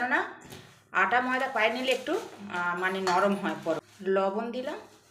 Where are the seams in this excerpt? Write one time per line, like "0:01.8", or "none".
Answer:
0:03.9

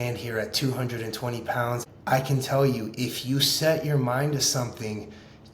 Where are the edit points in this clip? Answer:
0:01.8

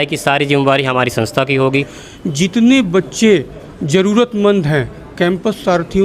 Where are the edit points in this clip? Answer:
0:01.7

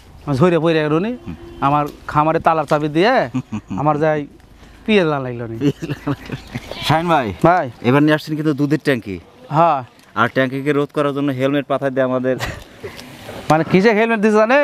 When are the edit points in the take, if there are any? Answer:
0:06.7

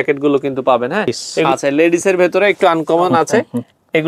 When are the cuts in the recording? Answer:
0:01.3

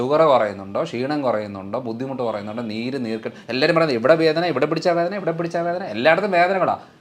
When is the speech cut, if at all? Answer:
none

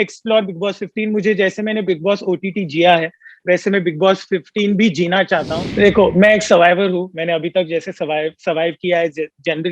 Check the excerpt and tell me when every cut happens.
0:05.6

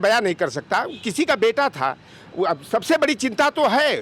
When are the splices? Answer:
none

